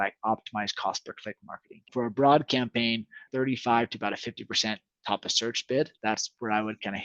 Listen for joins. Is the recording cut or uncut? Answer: cut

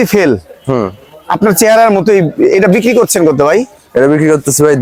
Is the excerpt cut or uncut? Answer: uncut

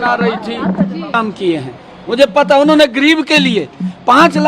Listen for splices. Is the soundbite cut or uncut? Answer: cut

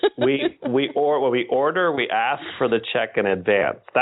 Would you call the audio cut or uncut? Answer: uncut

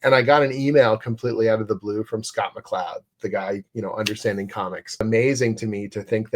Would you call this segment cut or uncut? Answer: cut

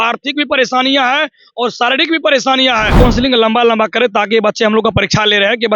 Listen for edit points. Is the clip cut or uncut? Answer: cut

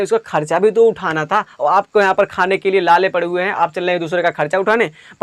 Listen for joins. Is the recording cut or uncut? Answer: uncut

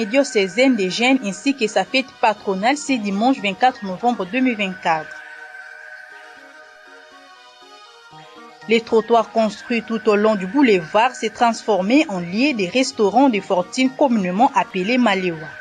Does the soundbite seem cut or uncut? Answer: uncut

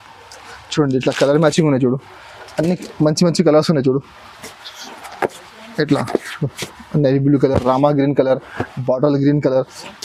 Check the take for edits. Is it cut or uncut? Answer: uncut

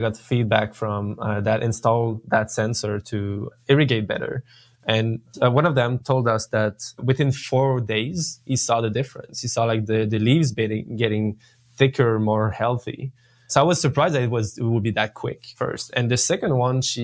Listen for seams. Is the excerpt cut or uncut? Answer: uncut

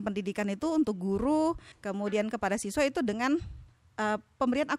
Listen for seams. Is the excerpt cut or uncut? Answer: cut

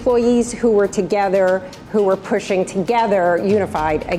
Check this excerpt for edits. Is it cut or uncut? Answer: uncut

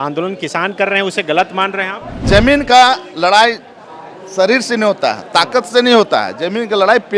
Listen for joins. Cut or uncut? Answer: cut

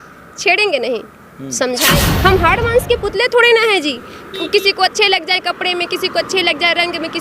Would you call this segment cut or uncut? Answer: cut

